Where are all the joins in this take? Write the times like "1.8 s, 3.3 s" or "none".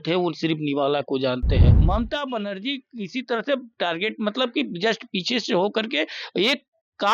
1.7 s